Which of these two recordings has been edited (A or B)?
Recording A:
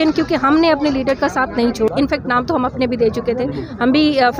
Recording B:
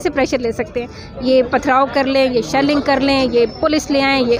A